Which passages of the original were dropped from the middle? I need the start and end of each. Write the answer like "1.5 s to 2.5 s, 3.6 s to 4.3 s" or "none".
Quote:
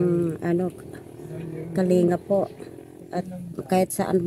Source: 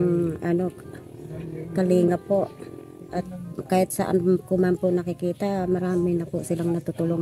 none